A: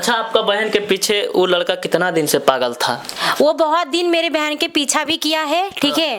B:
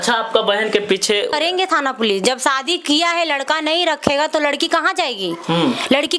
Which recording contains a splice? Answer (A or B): B